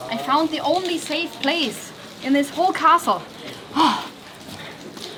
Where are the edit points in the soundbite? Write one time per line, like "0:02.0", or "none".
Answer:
none

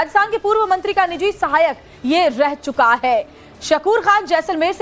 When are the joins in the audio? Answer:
none

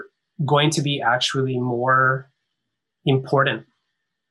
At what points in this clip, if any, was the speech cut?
none

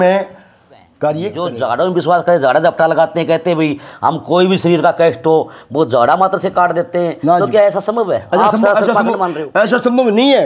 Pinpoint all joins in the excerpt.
0:01.4

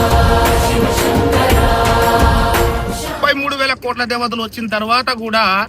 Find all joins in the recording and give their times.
0:03.2

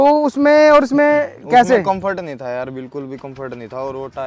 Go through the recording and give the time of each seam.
none

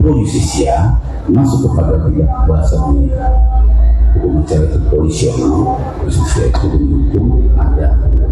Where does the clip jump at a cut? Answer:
0:01.1
0:06.1

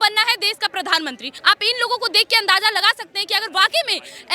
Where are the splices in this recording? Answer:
0:01.3

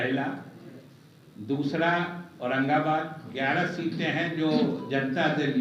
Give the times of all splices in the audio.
0:03.3

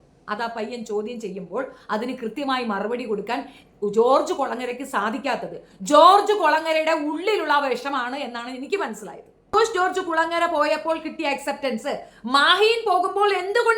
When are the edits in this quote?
0:09.5

